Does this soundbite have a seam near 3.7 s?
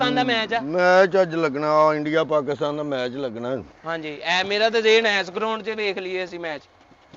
no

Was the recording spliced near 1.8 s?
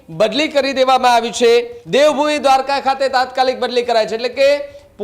yes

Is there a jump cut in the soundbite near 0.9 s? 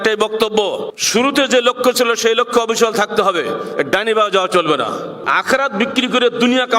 yes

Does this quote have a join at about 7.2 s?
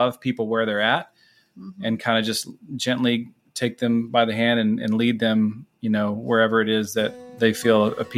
yes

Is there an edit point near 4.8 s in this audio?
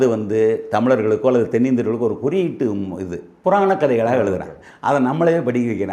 no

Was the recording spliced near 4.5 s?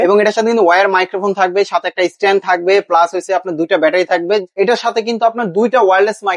yes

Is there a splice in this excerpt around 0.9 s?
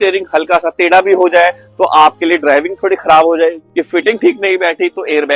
no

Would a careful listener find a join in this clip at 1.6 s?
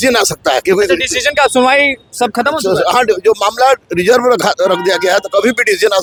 no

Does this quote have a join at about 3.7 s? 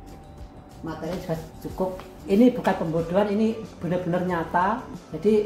no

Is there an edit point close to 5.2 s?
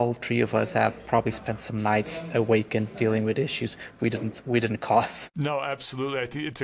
yes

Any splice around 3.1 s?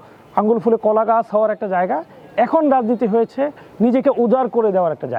no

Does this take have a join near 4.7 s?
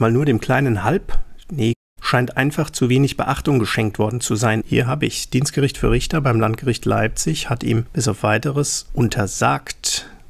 yes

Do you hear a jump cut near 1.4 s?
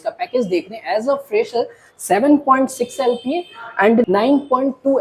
no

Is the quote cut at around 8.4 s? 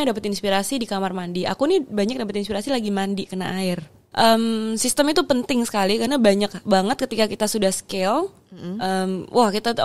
no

